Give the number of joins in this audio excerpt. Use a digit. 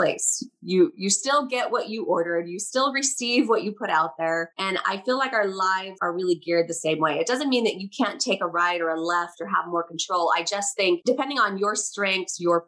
2